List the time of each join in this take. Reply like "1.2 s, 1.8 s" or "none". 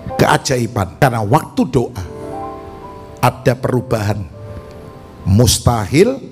0.9 s